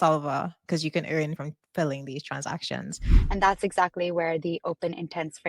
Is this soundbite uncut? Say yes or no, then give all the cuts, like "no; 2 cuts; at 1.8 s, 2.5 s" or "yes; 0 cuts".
no; 2 cuts; at 1.3 s, 3.1 s